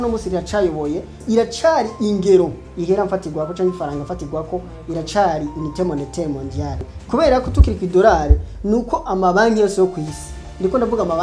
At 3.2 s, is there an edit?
no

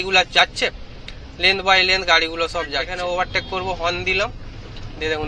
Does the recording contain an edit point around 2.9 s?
yes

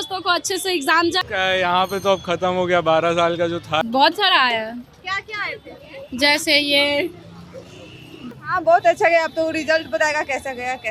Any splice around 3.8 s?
yes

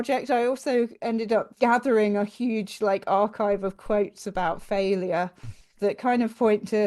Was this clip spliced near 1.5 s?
yes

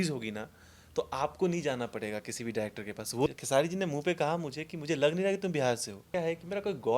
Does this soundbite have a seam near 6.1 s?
yes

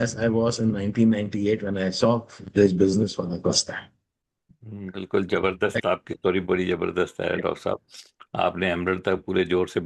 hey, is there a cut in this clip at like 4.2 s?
no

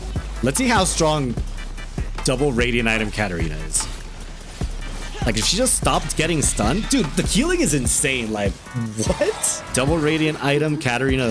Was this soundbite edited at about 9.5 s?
yes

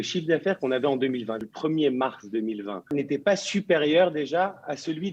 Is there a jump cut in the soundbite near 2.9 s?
yes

